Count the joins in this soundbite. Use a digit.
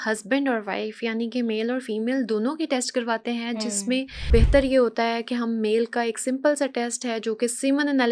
1